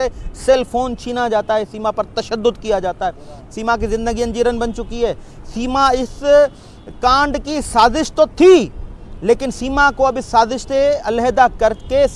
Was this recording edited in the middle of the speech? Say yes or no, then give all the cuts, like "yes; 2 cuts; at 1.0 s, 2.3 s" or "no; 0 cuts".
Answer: no; 0 cuts